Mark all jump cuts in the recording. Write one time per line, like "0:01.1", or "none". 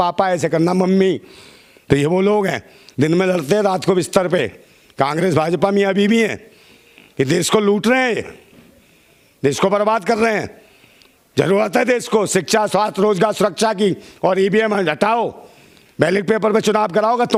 none